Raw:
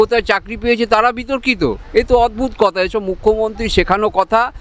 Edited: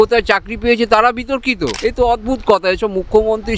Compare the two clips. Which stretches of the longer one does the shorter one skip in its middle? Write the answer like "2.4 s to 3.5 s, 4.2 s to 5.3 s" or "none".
1.7 s to 1.8 s